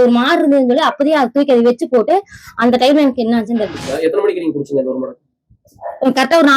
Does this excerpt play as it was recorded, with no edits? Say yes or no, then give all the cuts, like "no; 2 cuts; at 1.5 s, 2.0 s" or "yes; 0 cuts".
no; 1 cut; at 3.8 s